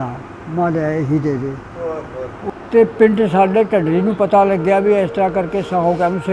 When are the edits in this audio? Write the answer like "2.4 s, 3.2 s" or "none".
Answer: 2.3 s